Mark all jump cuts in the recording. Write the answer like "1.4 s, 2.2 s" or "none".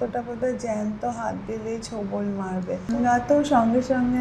2.9 s